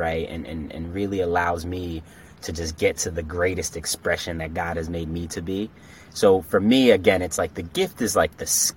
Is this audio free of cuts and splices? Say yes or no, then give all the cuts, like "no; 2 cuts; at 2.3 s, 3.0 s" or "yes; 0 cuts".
yes; 0 cuts